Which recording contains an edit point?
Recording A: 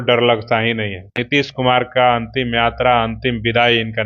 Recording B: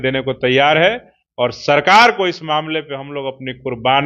A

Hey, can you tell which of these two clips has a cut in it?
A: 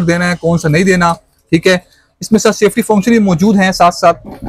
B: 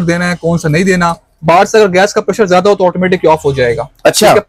B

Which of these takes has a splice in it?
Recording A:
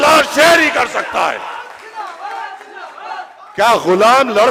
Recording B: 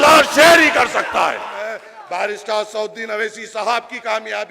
B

